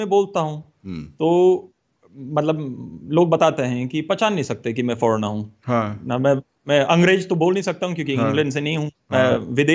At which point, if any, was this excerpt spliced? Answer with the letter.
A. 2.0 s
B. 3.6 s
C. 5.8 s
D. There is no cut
D